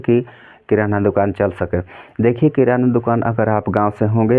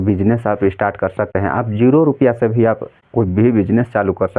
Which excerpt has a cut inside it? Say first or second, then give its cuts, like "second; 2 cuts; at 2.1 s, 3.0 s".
second; 2 cuts; at 1.3 s, 2.9 s